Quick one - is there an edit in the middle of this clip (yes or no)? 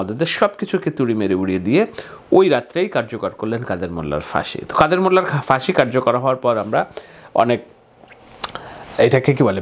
no